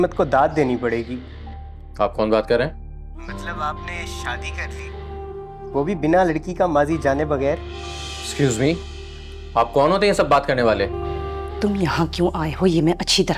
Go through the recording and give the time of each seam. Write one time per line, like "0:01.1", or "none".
0:11.0